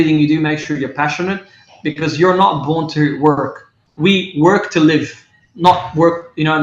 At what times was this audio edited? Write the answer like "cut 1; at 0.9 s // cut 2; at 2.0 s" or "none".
none

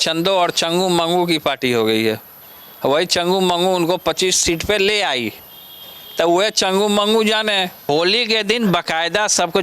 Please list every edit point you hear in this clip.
cut 1; at 7.9 s

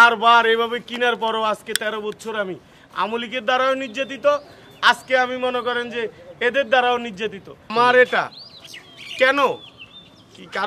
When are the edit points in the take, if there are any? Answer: cut 1; at 7.6 s

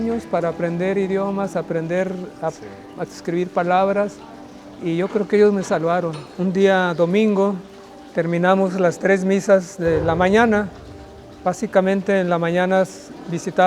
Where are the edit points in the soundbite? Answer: none

